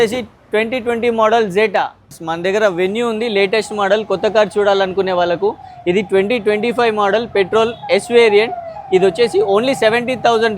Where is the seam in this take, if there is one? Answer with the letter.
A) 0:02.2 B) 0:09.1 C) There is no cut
A